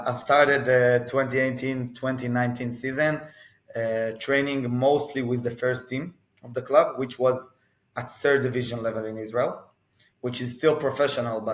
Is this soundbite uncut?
yes; 0 cuts

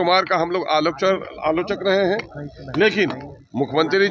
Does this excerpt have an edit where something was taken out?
no; 0 cuts

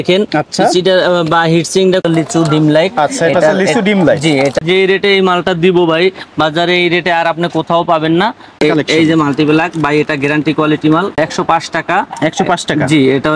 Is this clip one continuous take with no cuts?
no; 4 cuts; at 2.0 s, 4.6 s, 8.6 s, 11.2 s

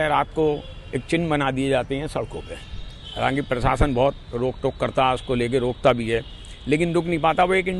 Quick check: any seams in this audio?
no; 0 cuts

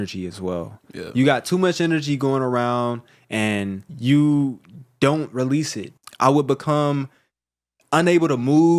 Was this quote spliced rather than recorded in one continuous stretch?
yes; 2 cuts; at 3.9 s, 5.8 s

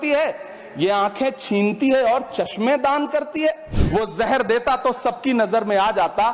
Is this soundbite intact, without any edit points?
no; 1 cut; at 3.7 s

